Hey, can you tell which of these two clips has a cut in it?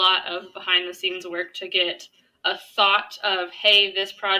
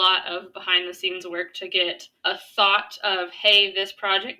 second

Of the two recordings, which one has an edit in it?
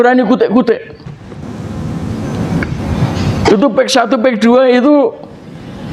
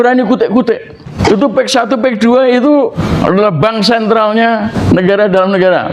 second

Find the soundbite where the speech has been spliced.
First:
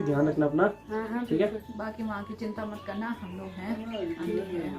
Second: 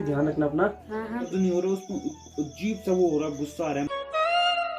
second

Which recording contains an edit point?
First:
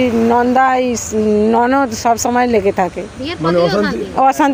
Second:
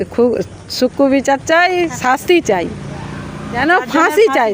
second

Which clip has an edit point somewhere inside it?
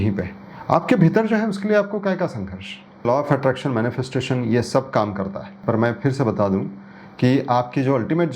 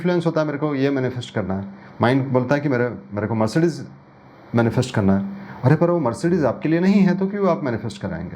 first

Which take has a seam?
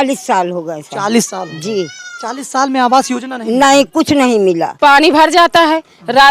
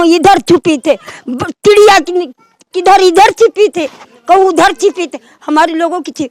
first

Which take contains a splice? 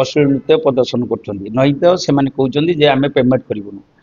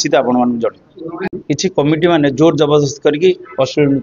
second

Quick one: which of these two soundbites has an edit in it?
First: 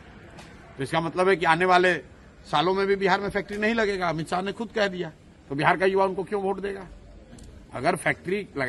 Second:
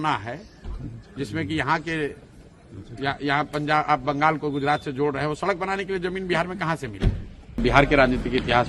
second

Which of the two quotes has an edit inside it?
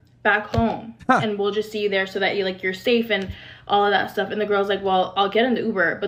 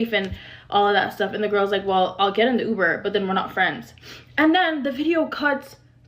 second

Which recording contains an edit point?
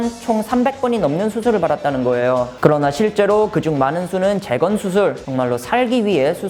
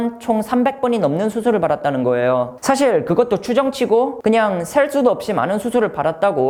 first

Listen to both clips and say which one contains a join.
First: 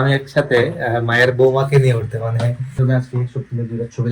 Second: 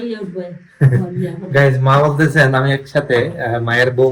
first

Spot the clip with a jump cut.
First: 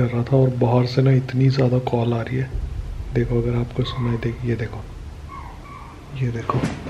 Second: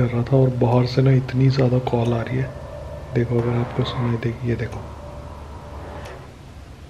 first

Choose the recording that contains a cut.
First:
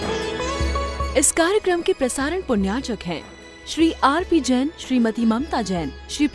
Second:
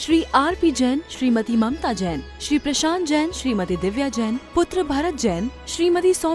first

